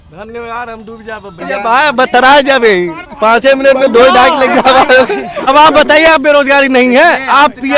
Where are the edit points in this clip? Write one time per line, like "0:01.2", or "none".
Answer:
0:01.4
0:05.5